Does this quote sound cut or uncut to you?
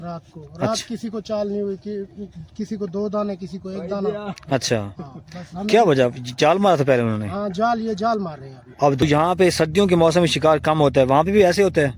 cut